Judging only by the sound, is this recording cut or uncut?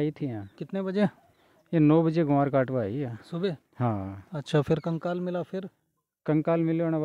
uncut